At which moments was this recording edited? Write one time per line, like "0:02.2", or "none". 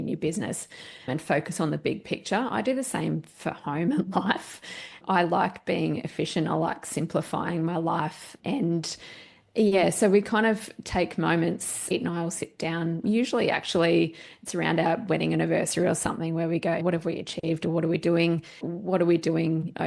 0:11.8
0:16.8
0:18.7